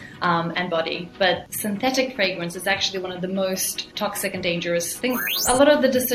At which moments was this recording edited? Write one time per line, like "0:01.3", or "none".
0:01.5
0:03.9
0:05.3